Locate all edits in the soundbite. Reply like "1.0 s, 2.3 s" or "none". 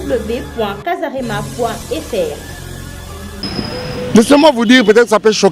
3.3 s